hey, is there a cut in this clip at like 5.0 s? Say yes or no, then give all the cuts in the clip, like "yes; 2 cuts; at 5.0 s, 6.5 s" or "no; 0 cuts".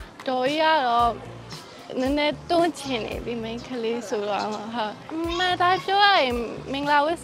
yes; 1 cut; at 5.0 s